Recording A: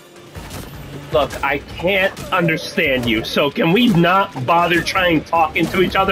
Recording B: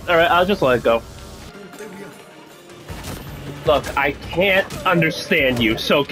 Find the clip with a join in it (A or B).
B